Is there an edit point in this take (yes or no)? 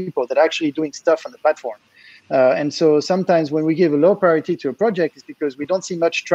no